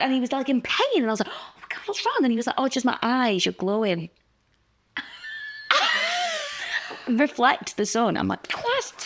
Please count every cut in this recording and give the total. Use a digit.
0